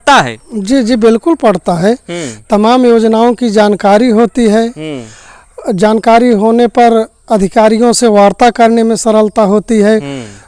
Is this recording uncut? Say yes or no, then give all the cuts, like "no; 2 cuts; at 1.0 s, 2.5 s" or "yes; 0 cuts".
yes; 0 cuts